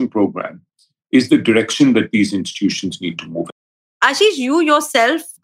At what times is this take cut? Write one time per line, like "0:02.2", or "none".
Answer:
none

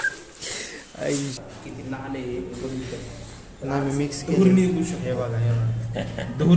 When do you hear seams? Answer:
0:01.4

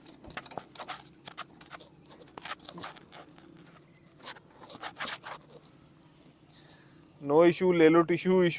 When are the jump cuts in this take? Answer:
none

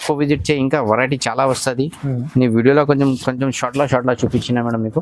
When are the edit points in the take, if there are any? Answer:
none

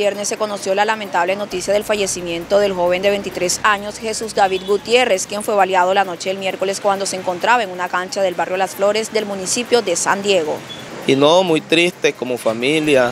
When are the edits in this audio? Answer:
0:10.7

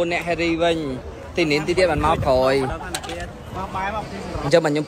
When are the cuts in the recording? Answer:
0:01.7

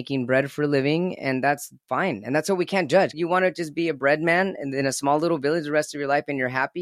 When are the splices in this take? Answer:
0:03.1

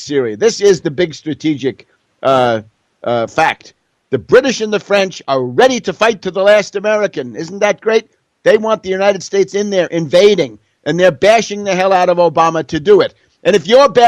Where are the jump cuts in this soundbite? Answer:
0:05.8

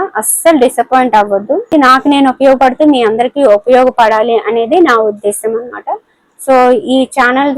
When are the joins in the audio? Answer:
0:01.7

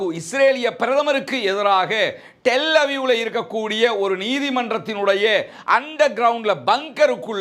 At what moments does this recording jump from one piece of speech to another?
none

